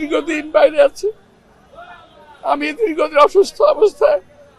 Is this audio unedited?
yes; 0 cuts

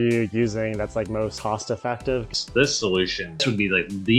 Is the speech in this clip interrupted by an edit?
yes; 3 cuts; at 1.4 s, 2.3 s, 3.4 s

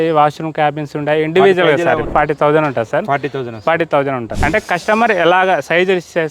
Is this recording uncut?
no; 2 cuts; at 2.1 s, 4.3 s

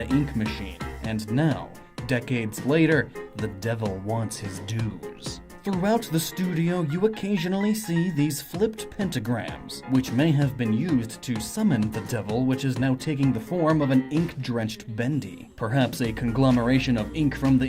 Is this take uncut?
no; 1 cut; at 12.5 s

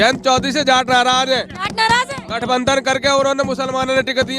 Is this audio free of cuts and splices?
yes; 0 cuts

